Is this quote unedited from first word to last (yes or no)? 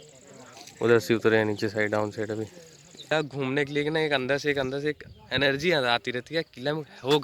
no